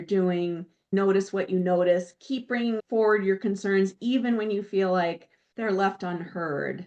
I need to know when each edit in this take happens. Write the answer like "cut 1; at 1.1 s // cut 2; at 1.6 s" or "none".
cut 1; at 0.9 s